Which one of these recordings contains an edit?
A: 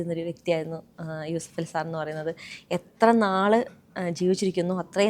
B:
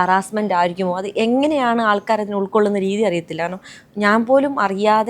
A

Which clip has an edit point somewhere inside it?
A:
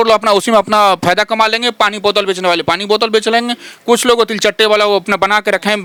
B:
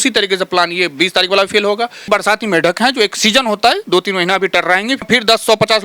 B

